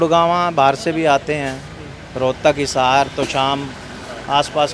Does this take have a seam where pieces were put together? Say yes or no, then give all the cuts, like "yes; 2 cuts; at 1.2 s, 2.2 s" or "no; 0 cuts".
no; 0 cuts